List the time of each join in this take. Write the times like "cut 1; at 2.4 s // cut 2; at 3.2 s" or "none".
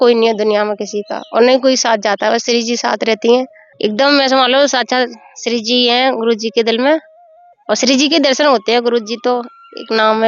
cut 1; at 3.7 s